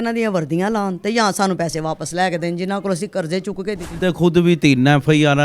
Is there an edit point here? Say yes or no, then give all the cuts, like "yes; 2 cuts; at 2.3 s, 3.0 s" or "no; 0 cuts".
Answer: yes; 1 cut; at 4.0 s